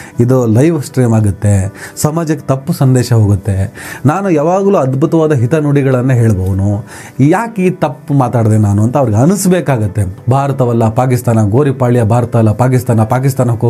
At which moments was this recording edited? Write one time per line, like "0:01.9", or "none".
0:10.2

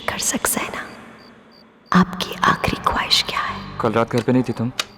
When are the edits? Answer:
0:03.6

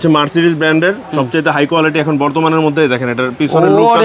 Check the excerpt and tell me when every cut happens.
none

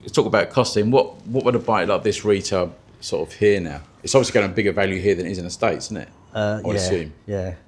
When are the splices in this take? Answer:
none

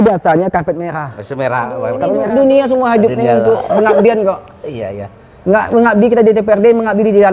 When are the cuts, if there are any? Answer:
0:01.9

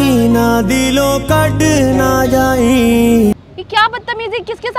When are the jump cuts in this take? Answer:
0:03.4

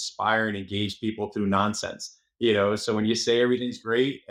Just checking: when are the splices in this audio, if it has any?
none

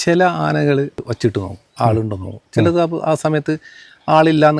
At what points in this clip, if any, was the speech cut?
0:00.9

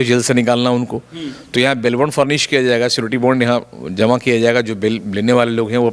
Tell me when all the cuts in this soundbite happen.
none

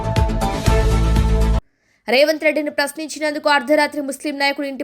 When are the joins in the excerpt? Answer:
0:01.7

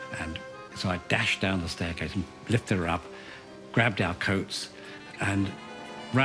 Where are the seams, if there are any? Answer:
0:04.9

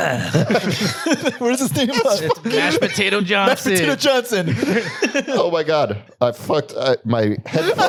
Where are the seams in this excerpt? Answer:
none

